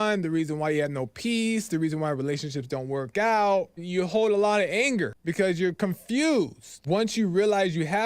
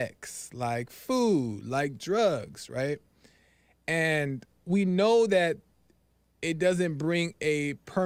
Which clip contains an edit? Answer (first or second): first